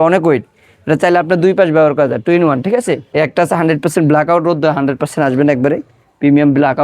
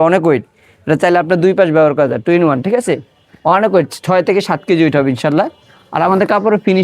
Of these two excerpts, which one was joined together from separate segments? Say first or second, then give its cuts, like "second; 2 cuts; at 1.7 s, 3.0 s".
first; 1 cut; at 3.0 s